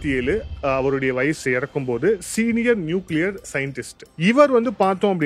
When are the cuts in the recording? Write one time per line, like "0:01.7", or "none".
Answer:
none